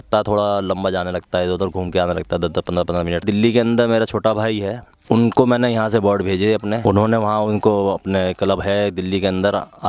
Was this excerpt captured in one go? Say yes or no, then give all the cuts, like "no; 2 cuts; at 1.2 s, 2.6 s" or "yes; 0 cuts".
no; 3 cuts; at 3.2 s, 4.9 s, 6.8 s